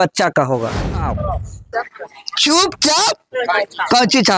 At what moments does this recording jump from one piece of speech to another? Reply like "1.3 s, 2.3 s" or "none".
1.1 s